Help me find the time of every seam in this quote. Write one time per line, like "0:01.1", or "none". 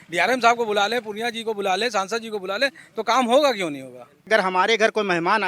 0:04.3